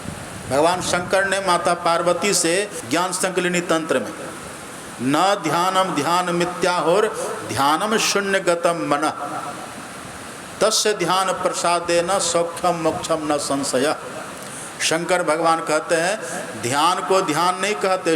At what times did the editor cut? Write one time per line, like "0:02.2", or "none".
0:03.1